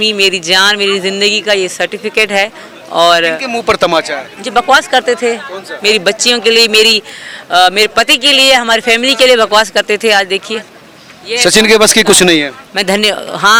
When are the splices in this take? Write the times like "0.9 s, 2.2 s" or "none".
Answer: none